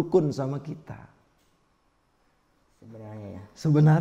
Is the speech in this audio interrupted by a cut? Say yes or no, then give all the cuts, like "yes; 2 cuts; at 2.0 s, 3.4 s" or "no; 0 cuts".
no; 0 cuts